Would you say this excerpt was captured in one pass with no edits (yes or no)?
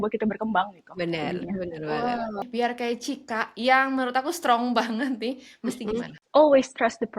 no